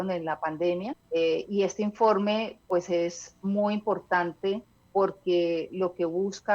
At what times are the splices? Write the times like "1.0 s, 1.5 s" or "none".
1.0 s, 4.7 s